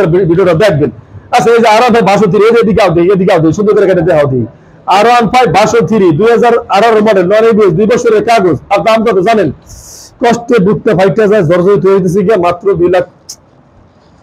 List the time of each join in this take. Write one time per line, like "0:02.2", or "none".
none